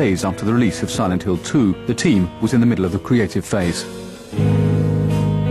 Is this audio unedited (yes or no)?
yes